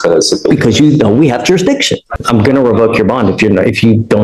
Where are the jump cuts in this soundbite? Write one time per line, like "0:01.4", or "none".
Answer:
0:02.0